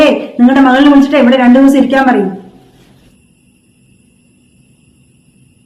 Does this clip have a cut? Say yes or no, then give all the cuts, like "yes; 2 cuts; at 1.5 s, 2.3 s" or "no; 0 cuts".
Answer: no; 0 cuts